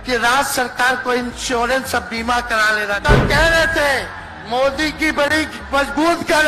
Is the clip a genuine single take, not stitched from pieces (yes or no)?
no